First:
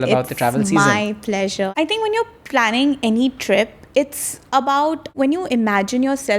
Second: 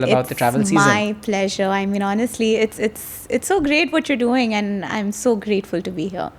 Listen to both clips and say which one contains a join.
first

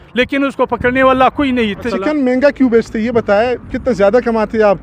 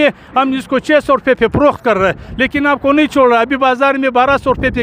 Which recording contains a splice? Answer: first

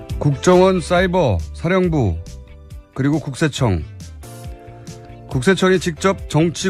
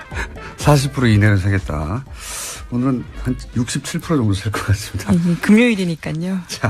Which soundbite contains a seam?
first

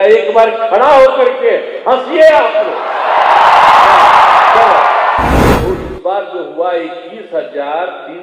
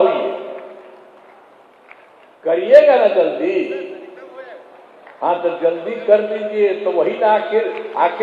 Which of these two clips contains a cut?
first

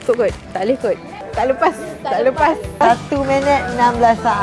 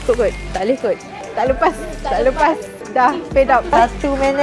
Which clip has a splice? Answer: first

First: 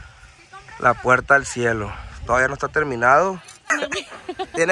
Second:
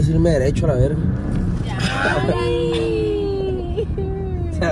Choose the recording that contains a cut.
first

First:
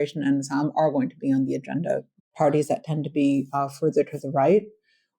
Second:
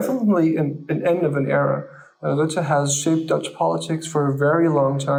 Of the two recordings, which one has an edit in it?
first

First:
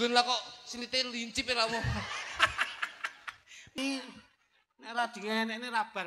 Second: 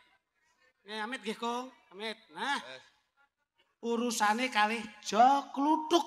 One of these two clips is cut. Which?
first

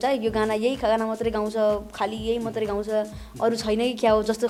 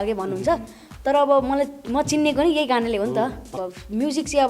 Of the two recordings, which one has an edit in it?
second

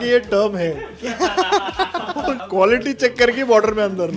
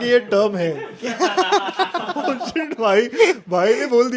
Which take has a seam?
first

